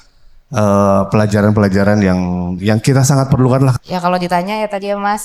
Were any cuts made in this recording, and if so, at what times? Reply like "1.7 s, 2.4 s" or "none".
3.7 s